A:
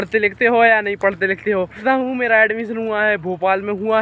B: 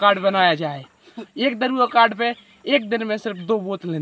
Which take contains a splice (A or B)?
A